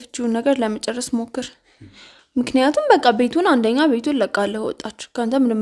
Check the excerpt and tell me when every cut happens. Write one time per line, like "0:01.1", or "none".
none